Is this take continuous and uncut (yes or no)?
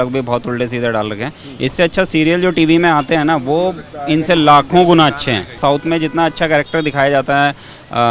no